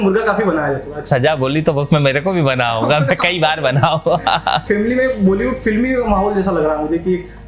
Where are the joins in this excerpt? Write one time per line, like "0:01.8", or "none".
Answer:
0:01.1
0:04.6